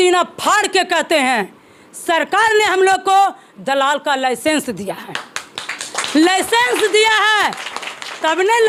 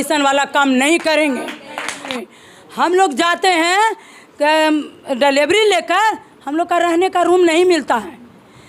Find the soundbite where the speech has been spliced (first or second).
second